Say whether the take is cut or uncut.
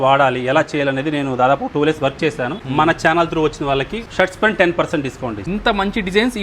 cut